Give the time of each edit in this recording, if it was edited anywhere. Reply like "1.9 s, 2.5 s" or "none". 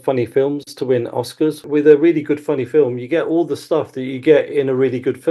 1.6 s